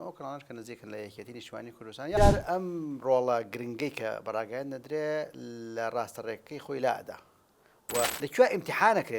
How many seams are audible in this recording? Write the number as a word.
two